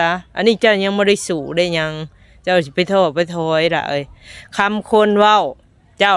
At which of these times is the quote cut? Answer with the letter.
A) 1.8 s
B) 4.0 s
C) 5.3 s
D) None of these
D